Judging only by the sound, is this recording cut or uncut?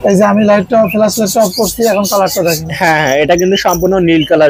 uncut